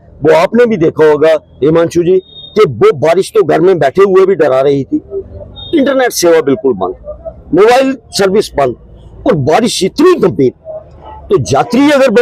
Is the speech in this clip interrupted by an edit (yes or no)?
no